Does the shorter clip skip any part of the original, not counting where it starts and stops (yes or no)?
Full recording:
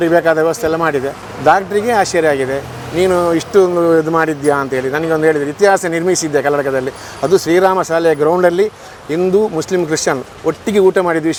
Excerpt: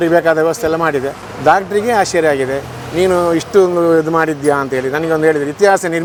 no